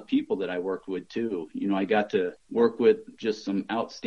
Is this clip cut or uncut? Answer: cut